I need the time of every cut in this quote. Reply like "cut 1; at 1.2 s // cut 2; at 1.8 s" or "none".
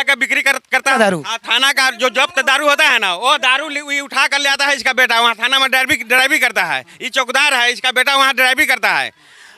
cut 1; at 0.9 s